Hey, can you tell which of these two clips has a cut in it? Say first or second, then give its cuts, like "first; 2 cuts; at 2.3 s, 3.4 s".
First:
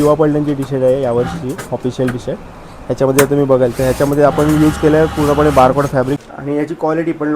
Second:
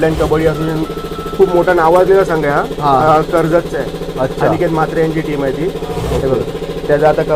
first; 1 cut; at 6.2 s